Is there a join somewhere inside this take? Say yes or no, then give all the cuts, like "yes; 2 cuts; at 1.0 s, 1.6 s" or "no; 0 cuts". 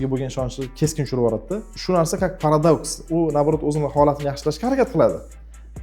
yes; 1 cut; at 1.7 s